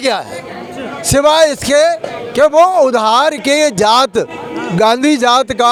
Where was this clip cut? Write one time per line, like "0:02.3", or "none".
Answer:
none

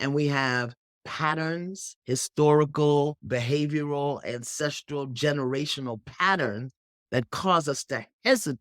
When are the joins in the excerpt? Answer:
0:01.9
0:03.2

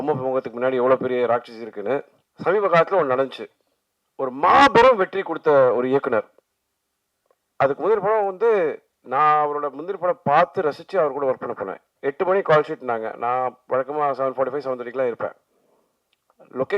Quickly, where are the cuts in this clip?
0:02.2

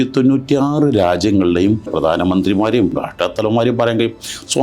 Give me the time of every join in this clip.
0:01.9
0:02.9

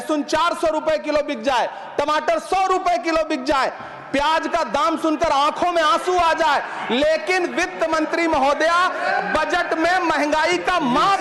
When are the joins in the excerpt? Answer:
none

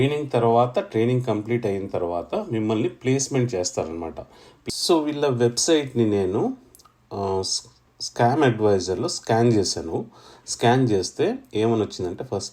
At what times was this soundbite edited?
0:04.5

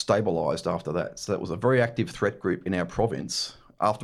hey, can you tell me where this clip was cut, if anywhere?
none

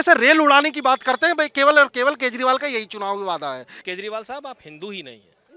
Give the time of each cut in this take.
0:03.7

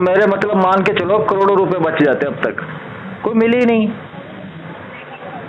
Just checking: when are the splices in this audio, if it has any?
none

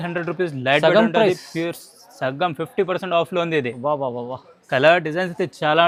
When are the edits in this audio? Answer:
none

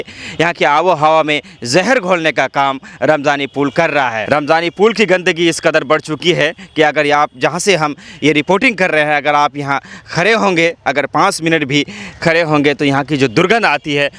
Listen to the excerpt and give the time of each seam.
none

